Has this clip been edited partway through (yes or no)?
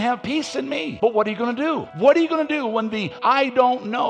yes